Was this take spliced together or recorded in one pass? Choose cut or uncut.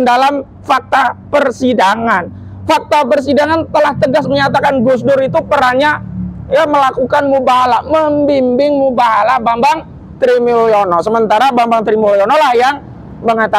uncut